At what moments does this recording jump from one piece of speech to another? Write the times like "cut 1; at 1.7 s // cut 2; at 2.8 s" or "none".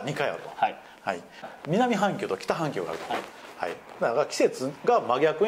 cut 1; at 1.5 s